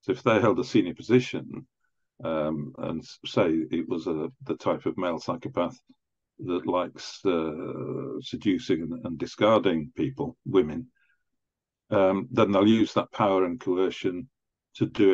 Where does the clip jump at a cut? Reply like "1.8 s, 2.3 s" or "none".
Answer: none